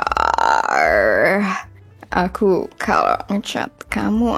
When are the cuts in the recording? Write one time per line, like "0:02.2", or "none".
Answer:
none

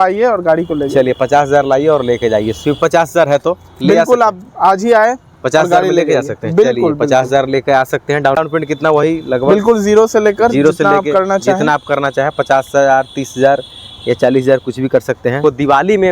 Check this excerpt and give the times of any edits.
0:02.8
0:08.4
0:15.4

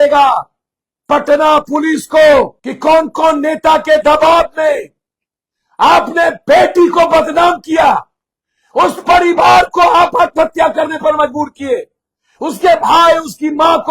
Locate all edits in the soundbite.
0:02.6

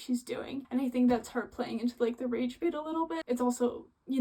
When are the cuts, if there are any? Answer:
0:03.2

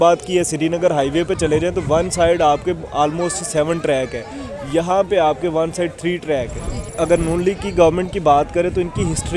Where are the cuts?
0:06.8

